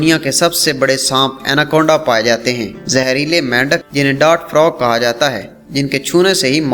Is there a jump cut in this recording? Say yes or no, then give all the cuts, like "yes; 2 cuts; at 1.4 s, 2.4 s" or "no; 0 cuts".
no; 0 cuts